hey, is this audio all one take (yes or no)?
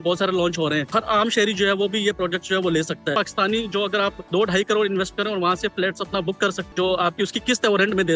no